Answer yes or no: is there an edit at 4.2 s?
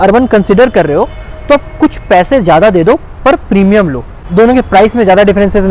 yes